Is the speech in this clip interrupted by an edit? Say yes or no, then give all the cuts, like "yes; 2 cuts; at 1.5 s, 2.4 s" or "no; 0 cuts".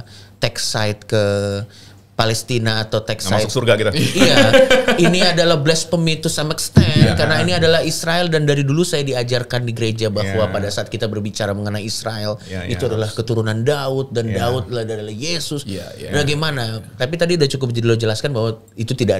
no; 0 cuts